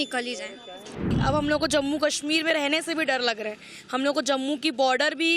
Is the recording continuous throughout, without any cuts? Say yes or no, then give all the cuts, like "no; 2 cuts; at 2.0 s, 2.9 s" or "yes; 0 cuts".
no; 1 cut; at 1.1 s